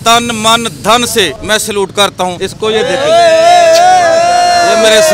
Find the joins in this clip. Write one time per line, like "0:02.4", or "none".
0:01.4
0:02.4